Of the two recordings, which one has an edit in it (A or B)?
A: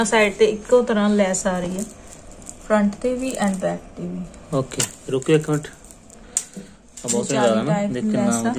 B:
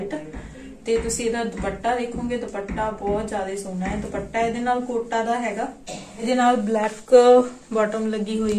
B